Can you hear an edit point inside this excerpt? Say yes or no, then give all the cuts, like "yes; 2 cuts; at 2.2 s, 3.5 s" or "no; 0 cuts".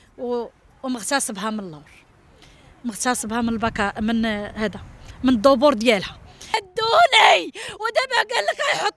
yes; 1 cut; at 6.7 s